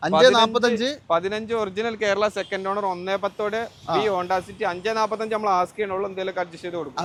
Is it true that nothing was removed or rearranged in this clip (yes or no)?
yes